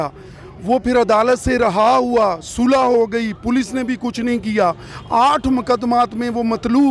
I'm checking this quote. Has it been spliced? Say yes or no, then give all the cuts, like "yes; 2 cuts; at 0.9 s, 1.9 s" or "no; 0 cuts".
no; 0 cuts